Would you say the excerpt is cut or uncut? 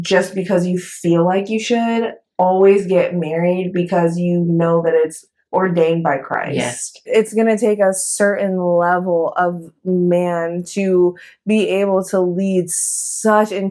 cut